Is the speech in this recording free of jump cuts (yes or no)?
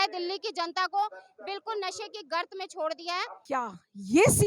no